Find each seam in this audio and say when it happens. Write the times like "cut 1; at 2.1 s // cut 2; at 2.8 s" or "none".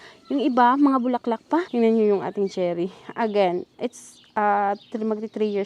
cut 1; at 1.7 s